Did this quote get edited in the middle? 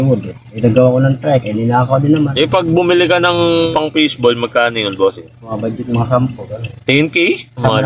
yes; 2 cuts; at 2.3 s, 5.5 s

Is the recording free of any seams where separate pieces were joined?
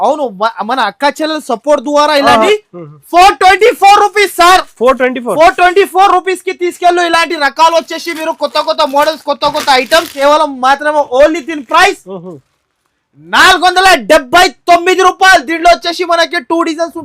no; 2 cuts; at 2.5 s, 10.2 s

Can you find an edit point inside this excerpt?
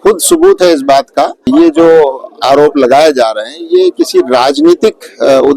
yes; 1 cut; at 1.5 s

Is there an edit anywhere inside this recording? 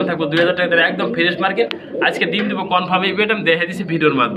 no; 0 cuts

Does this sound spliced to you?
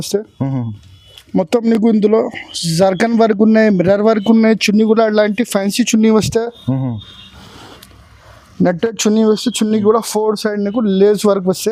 no; 0 cuts

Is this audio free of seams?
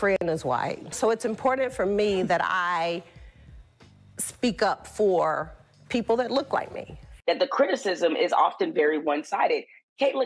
no; 1 cut; at 7.1 s

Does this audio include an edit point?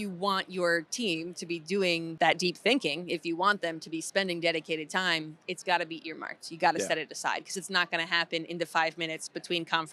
yes; 1 cut; at 2.1 s

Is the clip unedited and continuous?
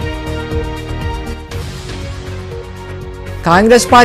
no; 1 cut; at 1.2 s

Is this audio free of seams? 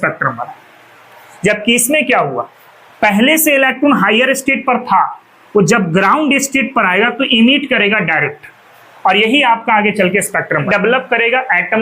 no; 1 cut; at 10.6 s

